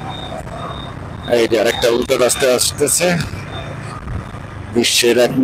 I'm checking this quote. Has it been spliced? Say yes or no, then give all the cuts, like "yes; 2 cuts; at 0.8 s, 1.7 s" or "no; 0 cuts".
no; 0 cuts